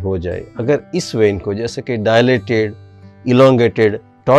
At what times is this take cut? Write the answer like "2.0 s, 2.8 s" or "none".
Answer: none